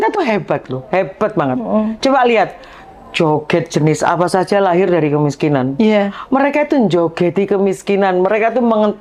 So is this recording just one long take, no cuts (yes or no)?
yes